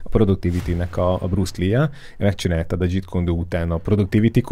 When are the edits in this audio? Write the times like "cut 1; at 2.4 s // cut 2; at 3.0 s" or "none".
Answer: none